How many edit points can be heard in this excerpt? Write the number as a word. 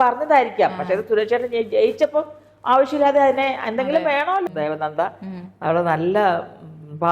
one